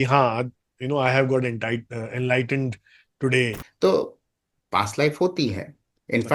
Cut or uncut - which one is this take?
cut